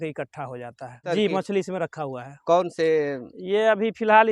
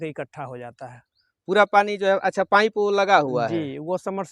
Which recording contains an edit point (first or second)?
first